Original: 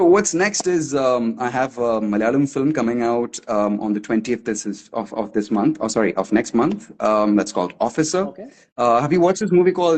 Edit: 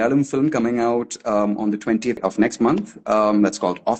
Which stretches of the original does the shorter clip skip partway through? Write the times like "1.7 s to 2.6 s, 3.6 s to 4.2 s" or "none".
4.4 s to 6.1 s